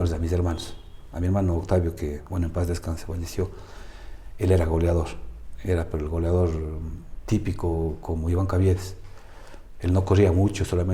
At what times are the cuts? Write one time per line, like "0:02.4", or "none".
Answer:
none